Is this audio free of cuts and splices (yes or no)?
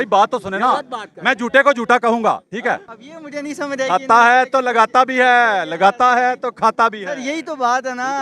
no